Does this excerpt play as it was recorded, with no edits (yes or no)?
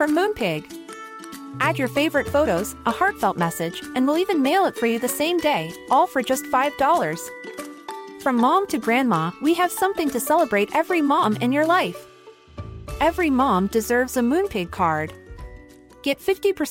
yes